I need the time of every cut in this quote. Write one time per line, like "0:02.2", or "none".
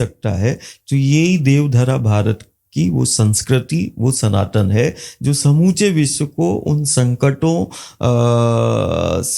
none